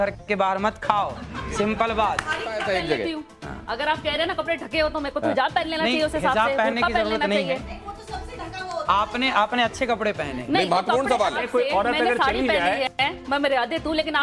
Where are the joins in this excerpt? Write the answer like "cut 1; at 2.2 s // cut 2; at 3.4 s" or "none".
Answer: none